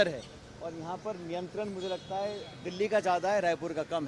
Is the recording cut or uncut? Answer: uncut